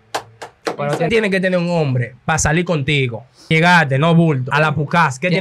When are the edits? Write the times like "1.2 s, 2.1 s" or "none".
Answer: 1.1 s, 3.5 s, 4.5 s